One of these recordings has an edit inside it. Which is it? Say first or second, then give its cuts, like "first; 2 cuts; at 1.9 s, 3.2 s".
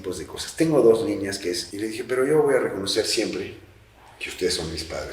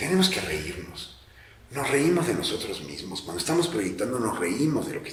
first; 1 cut; at 1.7 s